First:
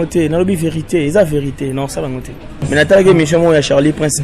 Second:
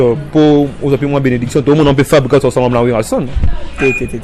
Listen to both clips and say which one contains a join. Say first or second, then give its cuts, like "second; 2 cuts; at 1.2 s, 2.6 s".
first; 1 cut; at 2.5 s